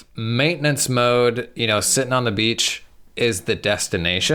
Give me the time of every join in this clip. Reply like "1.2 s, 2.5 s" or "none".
none

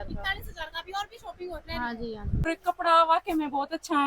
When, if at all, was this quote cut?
2.5 s

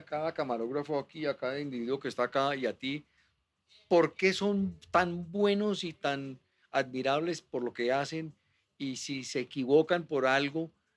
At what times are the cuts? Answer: none

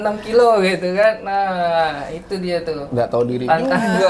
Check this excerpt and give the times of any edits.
none

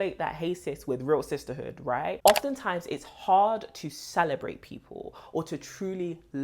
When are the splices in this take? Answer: 2.2 s

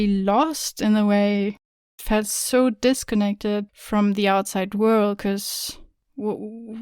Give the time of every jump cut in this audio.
1.8 s

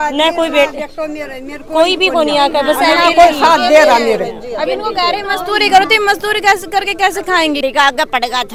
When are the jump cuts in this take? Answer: none

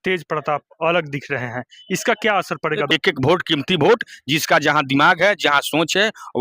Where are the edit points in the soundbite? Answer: 2.9 s

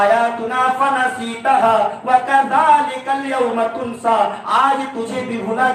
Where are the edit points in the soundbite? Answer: none

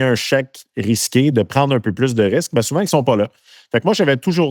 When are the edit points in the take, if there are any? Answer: none

